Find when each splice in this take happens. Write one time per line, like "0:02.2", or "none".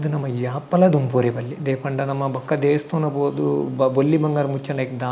none